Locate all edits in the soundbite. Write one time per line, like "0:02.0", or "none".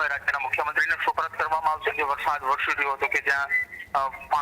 0:01.9